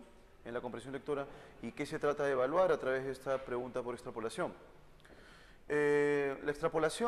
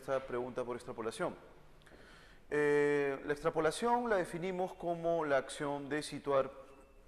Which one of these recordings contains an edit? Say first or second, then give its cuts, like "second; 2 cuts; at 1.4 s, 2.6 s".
second; 1 cut; at 5.3 s